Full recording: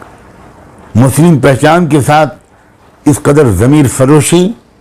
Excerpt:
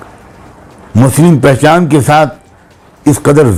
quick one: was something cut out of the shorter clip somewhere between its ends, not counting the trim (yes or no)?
no